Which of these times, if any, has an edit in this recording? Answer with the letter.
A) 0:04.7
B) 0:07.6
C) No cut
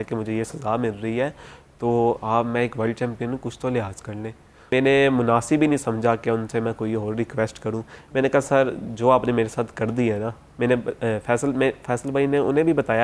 A